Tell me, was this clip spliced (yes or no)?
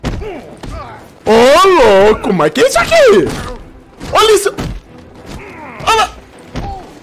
no